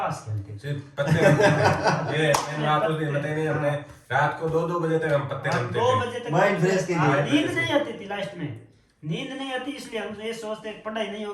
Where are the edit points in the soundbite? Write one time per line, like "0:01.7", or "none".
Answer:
none